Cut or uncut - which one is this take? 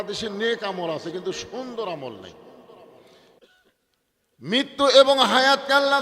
cut